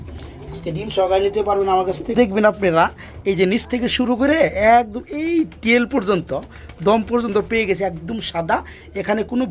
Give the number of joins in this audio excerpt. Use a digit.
1